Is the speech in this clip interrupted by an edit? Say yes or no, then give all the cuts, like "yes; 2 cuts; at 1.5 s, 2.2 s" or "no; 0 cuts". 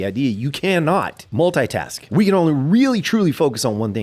yes; 2 cuts; at 1.2 s, 2.0 s